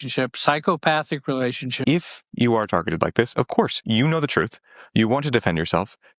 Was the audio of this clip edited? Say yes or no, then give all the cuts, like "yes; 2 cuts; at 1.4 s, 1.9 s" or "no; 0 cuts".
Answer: yes; 2 cuts; at 1.7 s, 3.8 s